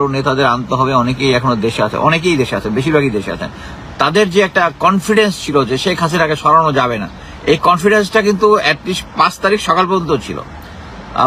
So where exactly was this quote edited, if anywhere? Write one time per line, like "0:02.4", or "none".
none